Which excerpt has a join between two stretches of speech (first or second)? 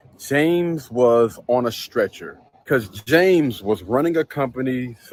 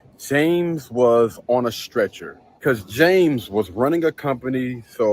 second